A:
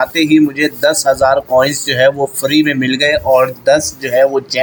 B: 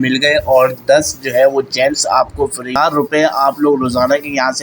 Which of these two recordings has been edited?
B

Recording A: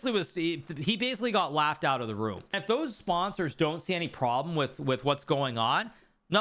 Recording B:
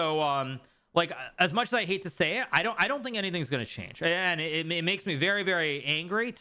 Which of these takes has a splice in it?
A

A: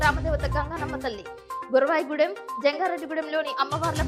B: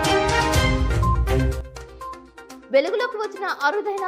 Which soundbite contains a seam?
B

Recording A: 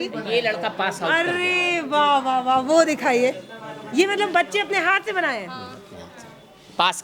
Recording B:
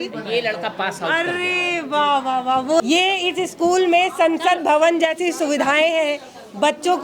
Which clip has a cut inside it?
B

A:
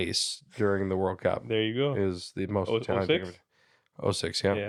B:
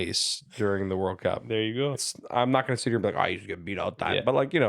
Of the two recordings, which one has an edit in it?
B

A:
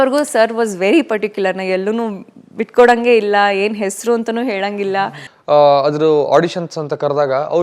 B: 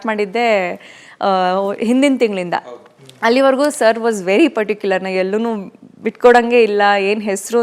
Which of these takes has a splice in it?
A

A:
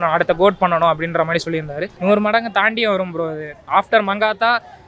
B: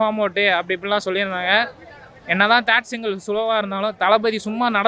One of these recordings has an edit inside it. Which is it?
A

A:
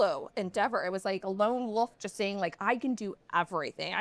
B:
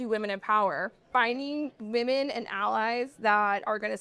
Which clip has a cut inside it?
B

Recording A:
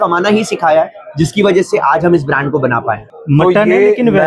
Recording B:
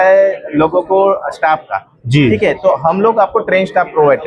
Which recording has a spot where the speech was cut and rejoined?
A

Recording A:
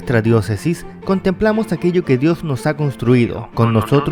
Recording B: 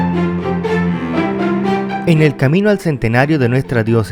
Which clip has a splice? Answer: B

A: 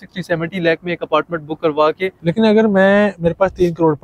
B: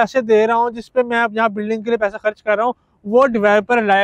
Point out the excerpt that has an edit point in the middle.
A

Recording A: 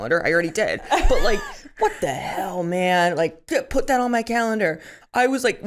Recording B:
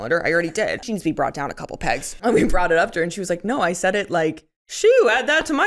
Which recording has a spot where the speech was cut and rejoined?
B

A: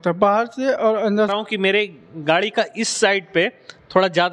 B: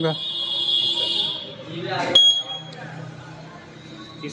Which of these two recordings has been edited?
A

